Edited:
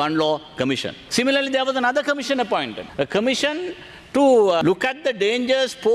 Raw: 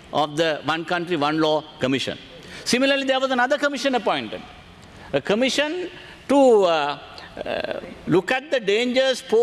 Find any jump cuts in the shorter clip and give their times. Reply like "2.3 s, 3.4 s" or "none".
1.0 s, 2.8 s, 4.6 s